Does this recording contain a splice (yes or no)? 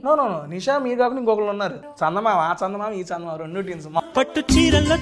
yes